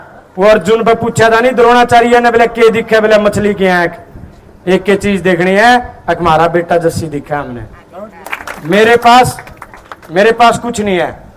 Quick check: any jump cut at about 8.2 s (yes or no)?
yes